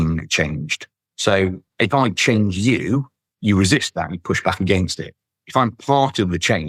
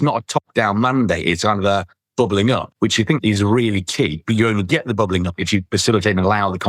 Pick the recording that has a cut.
second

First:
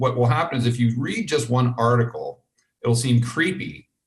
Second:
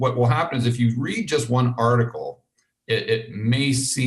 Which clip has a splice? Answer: first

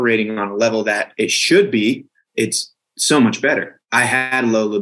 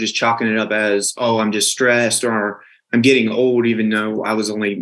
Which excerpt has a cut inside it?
first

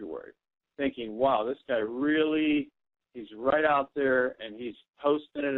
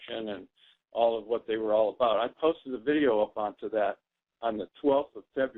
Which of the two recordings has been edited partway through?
first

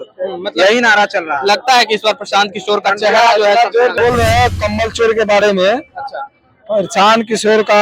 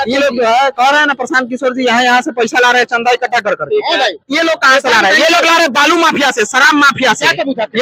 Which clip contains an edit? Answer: first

